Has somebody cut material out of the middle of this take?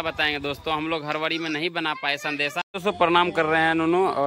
yes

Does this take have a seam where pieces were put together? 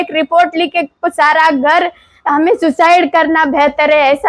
no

